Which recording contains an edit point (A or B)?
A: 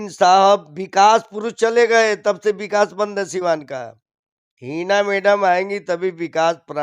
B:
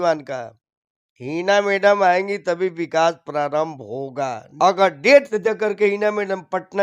B